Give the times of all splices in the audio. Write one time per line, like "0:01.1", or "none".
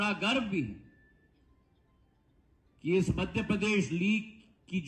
none